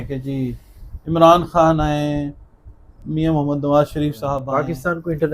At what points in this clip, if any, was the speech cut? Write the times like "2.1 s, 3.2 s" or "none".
4.4 s